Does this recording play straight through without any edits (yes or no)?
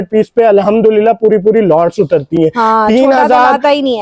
yes